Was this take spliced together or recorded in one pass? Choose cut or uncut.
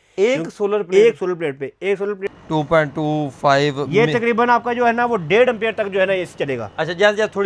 cut